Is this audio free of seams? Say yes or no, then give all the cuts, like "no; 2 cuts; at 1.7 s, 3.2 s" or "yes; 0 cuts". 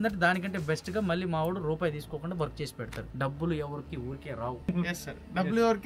no; 2 cuts; at 3.0 s, 4.7 s